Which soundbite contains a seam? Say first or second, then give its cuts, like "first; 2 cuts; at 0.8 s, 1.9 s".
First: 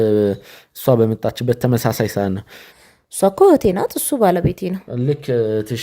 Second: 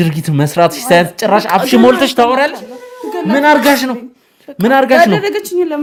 first; 1 cut; at 2.8 s